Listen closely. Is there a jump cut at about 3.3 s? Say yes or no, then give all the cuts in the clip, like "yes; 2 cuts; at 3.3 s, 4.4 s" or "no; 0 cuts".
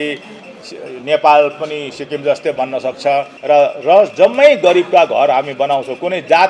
yes; 1 cut; at 3.3 s